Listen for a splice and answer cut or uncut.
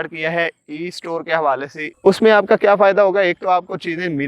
cut